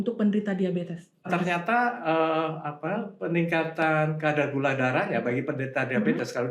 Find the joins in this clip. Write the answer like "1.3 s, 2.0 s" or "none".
1.3 s